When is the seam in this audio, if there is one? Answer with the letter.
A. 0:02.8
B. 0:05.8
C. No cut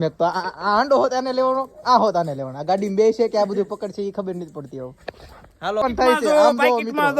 B